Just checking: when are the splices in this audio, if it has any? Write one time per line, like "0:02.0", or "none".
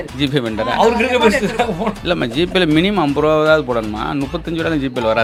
none